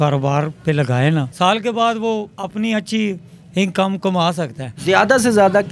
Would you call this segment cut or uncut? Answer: cut